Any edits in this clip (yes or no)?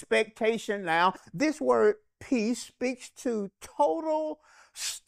yes